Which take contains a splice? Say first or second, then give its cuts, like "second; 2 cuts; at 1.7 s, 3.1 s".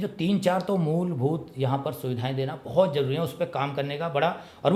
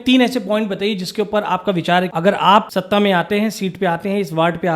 second; 2 cuts; at 2.1 s, 2.7 s